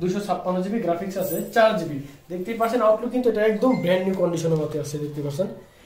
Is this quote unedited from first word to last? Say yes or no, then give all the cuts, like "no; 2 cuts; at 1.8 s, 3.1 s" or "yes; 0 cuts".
yes; 0 cuts